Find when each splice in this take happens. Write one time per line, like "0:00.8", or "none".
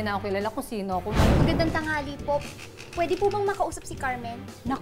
0:01.3